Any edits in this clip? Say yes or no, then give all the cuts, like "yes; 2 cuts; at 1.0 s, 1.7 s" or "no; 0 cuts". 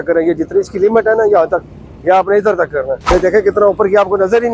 yes; 1 cut; at 3.0 s